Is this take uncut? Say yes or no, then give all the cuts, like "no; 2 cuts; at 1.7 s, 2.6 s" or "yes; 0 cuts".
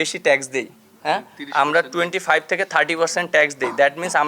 yes; 0 cuts